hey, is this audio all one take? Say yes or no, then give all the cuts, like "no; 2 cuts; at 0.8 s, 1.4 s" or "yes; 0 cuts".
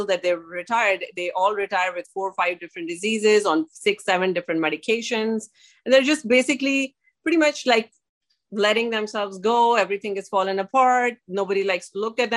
yes; 0 cuts